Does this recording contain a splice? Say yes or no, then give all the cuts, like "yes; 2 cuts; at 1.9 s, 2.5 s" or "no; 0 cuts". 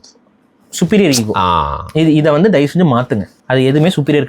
yes; 1 cut; at 3.3 s